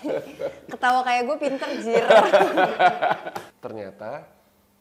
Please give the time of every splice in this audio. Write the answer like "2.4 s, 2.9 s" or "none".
3.5 s